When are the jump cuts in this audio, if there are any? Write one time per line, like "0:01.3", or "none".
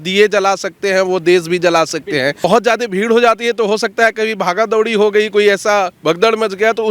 0:02.4